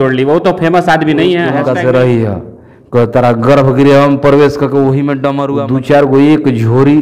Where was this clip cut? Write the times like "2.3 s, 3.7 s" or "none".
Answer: 1.6 s, 5.5 s